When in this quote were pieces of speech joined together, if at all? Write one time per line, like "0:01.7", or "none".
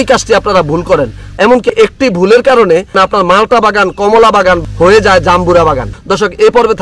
0:01.6
0:05.9